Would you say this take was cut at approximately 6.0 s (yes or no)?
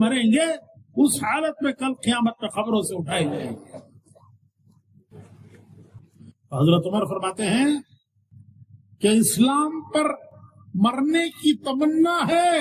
yes